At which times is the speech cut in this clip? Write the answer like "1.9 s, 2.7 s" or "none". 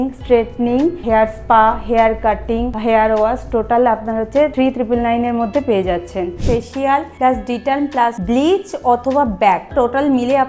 1.0 s, 2.7 s, 4.5 s, 6.8 s, 8.2 s, 9.7 s